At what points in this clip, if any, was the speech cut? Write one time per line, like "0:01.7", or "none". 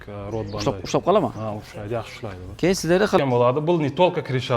0:03.2